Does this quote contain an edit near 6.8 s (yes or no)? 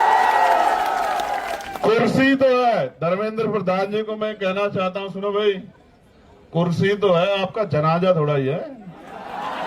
no